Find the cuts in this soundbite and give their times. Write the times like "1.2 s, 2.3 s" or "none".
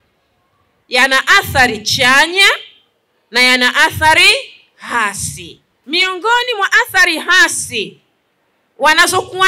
5.7 s